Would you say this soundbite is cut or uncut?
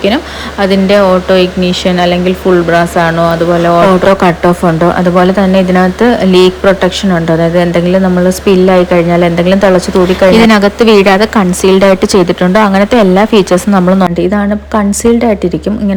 cut